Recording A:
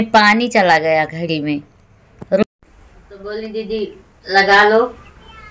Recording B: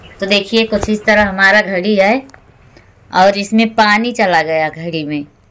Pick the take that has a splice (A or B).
A